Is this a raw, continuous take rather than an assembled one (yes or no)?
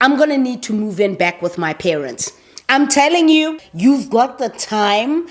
no